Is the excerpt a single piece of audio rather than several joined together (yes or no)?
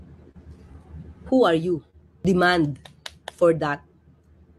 no